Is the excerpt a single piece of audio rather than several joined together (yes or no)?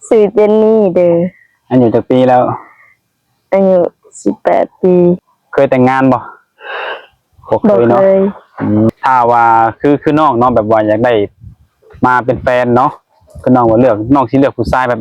no